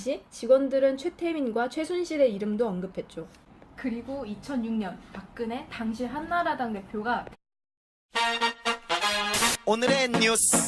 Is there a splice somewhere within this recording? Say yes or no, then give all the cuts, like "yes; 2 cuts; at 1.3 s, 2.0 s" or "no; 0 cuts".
no; 0 cuts